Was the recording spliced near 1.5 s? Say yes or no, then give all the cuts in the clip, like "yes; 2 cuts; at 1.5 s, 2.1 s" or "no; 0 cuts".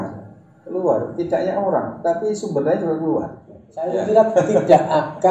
no; 1 cut; at 3.9 s